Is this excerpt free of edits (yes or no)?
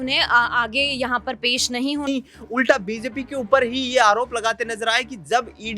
no